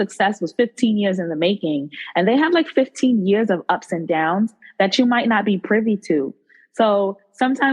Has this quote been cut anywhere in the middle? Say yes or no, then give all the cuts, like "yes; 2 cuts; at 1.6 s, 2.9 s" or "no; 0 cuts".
no; 0 cuts